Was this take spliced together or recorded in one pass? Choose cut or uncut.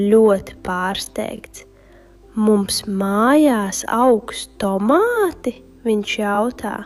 uncut